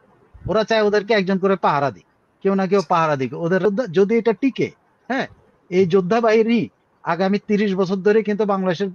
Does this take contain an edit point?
yes; 1 cut; at 3.6 s

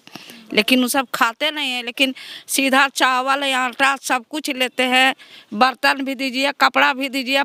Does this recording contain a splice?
no; 0 cuts

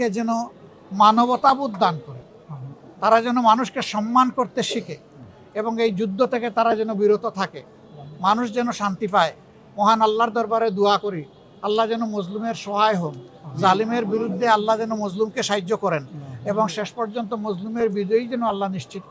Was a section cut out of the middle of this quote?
no; 0 cuts

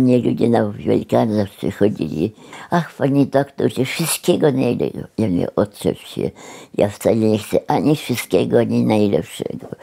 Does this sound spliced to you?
yes; 1 cut; at 2.5 s

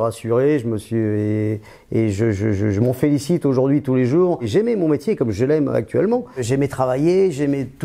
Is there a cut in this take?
yes; 2 cuts; at 4.5 s, 6.4 s

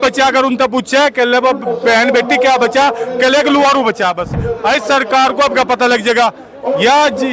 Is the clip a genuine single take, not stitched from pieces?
no; 1 cut; at 4.4 s

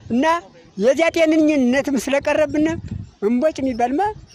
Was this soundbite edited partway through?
yes; 1 cut; at 1.8 s

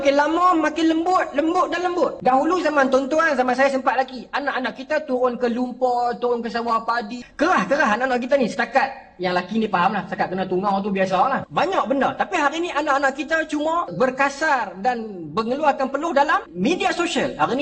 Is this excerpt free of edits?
no; 5 cuts; at 2.2 s, 7.2 s, 11.5 s, 13.9 s, 16.5 s

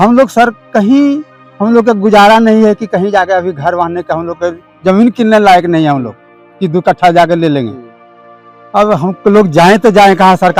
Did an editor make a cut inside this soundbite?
no; 0 cuts

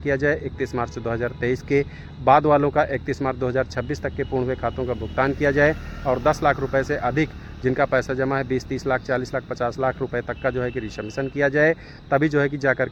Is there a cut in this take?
no; 0 cuts

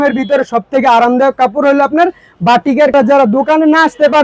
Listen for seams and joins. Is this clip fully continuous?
no; 1 cut; at 2.9 s

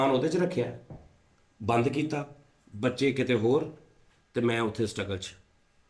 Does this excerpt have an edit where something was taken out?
no; 0 cuts

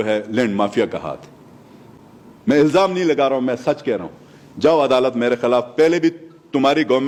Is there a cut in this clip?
no; 0 cuts

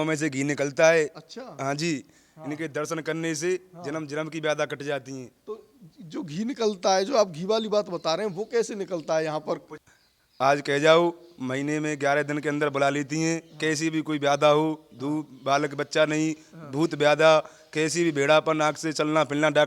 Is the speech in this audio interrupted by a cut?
yes; 1 cut; at 9.7 s

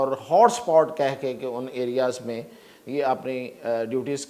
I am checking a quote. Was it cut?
no; 0 cuts

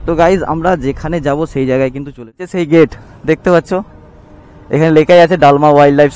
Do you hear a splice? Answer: yes; 1 cut; at 2.5 s

